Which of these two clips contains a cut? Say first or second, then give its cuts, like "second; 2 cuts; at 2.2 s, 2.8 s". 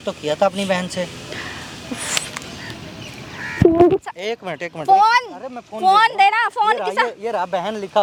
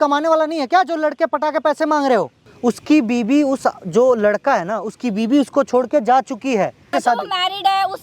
second; 2 cuts; at 2.4 s, 6.8 s